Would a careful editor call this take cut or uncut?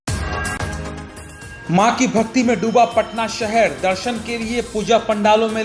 cut